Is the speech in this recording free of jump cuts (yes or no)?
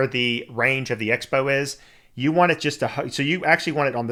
yes